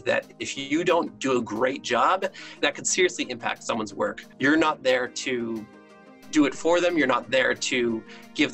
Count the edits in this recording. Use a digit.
2